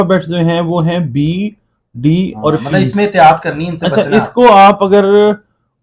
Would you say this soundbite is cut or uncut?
cut